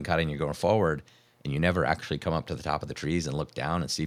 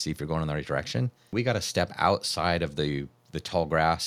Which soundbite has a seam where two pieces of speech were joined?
second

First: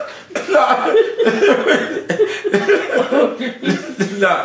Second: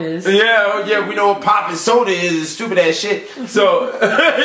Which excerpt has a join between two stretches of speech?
second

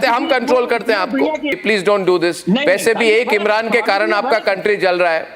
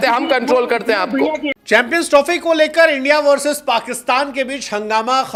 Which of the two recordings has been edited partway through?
first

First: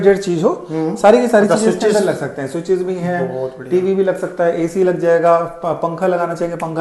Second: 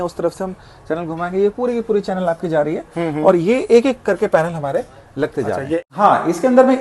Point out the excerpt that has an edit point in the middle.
second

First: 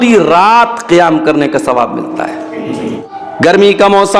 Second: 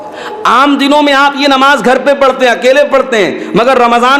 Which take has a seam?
first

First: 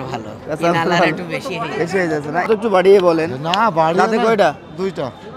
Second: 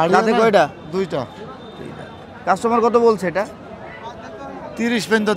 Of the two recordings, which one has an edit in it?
first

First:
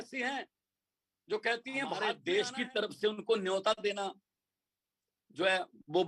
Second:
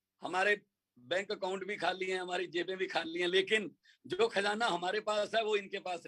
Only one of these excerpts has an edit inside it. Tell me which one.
first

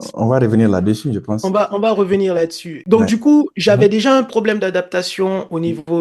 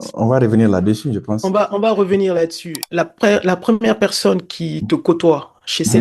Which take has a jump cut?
second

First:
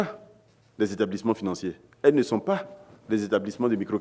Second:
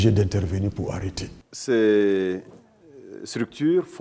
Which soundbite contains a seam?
second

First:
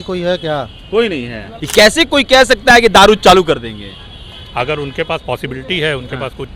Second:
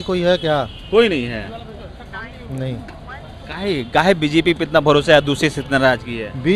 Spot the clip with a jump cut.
first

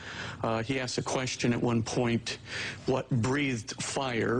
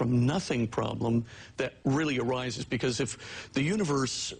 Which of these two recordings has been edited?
first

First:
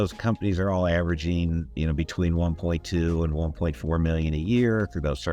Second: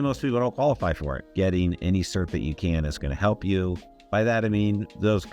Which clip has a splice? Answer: second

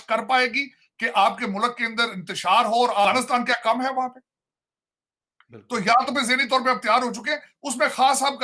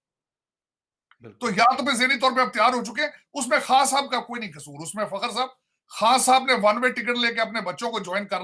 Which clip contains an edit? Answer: first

